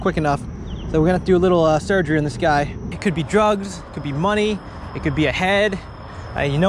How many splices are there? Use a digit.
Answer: 1